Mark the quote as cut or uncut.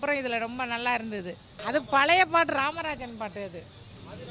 cut